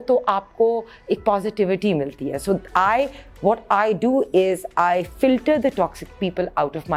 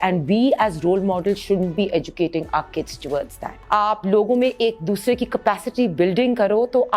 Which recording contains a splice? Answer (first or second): second